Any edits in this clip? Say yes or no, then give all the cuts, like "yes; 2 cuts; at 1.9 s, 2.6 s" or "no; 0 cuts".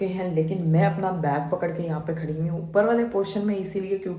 no; 0 cuts